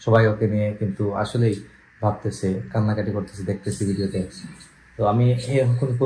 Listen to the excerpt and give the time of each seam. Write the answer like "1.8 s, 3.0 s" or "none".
none